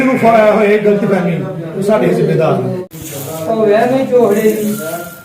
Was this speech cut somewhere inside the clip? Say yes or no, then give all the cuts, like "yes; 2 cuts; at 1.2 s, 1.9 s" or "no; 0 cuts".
yes; 1 cut; at 2.8 s